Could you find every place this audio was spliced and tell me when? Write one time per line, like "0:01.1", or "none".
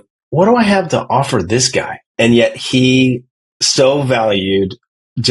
0:02.1